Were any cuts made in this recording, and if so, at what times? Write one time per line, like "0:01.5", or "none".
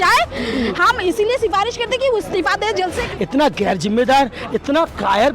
0:03.0